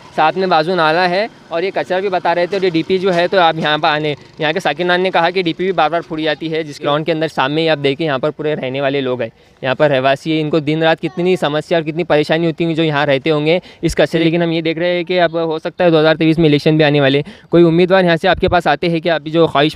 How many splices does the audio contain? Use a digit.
2